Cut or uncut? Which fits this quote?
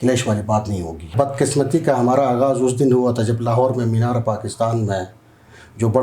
cut